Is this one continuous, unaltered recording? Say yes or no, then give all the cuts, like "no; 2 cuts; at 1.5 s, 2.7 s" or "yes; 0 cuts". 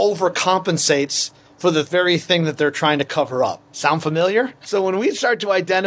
no; 2 cuts; at 3.7 s, 4.6 s